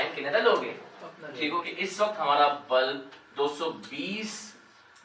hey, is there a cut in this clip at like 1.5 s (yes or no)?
yes